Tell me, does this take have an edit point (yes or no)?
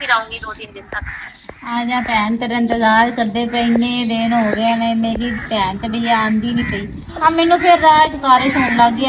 no